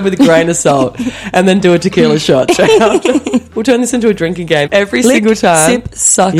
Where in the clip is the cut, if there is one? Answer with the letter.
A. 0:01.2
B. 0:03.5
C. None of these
B